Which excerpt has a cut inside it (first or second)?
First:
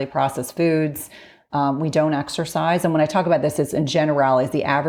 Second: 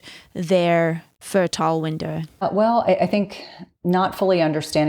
second